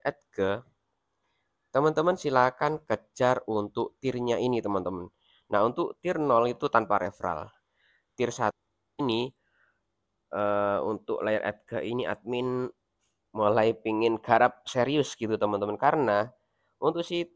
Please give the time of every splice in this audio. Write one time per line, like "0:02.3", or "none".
0:08.6